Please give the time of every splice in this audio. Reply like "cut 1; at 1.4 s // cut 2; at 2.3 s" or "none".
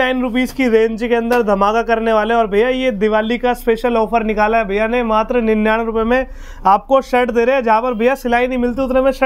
none